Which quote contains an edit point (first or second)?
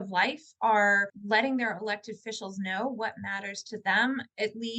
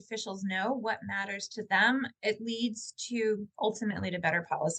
first